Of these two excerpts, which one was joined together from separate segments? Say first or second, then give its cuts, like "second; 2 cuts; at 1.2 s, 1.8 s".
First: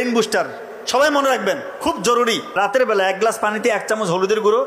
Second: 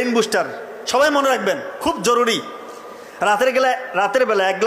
first; 1 cut; at 2.5 s